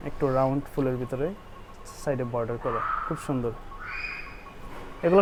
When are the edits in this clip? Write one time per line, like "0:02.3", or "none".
none

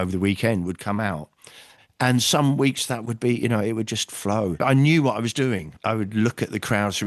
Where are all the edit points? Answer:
0:04.6
0:05.7

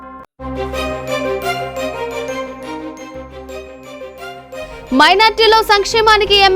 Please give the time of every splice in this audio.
0:04.7

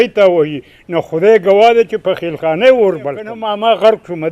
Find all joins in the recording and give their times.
0:03.4

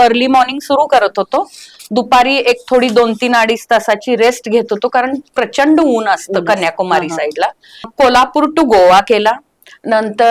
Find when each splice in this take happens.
0:07.9

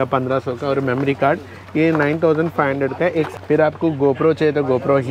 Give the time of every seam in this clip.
0:03.3

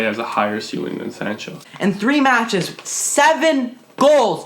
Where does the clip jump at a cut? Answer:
0:01.6

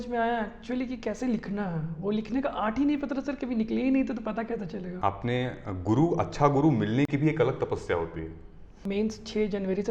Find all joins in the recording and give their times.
0:04.8
0:08.8

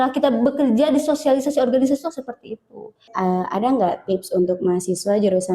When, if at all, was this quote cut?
0:03.1

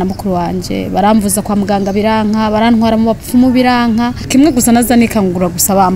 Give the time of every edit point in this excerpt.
0:04.2

